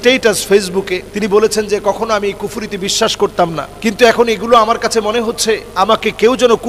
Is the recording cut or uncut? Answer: cut